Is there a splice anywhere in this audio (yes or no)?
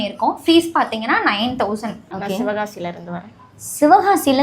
yes